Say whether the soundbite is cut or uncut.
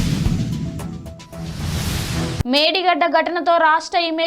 cut